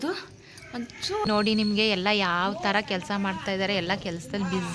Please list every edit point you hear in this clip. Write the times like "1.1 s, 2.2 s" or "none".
1.3 s

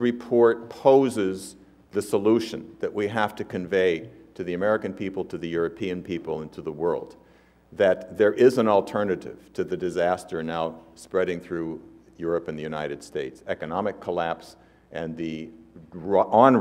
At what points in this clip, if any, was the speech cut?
9.0 s

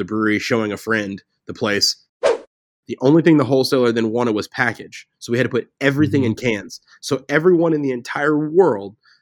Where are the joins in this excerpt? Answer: 2.2 s

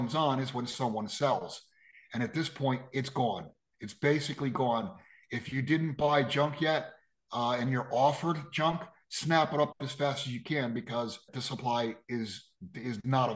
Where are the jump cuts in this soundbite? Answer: 11.3 s

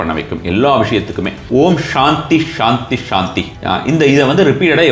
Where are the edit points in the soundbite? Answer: 1.4 s, 3.5 s

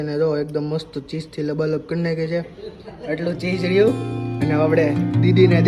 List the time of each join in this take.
none

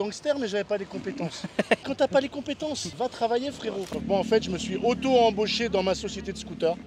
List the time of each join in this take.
1.8 s, 2.9 s, 3.9 s

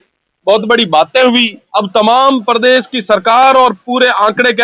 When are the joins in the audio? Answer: 1.6 s

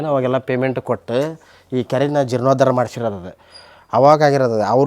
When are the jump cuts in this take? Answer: none

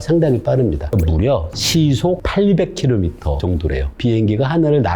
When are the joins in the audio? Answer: 1.0 s, 2.2 s, 3.5 s

